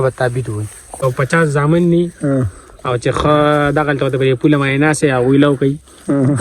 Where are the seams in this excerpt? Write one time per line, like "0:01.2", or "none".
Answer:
0:00.9